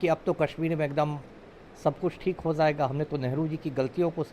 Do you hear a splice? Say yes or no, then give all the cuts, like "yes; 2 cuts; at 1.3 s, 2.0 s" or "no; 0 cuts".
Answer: no; 0 cuts